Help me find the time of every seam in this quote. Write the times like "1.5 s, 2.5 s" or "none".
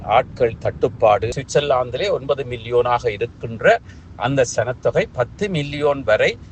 1.4 s